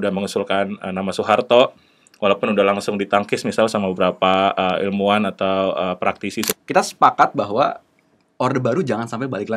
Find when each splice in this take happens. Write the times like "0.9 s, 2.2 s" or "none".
6.5 s